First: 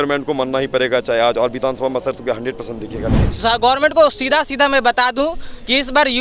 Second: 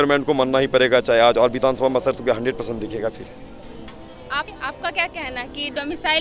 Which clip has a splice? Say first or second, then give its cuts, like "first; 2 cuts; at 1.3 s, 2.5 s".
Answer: first; 1 cut; at 3.2 s